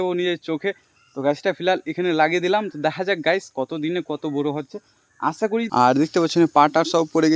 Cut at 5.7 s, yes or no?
yes